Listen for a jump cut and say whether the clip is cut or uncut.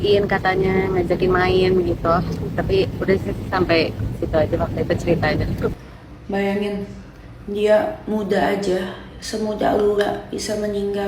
cut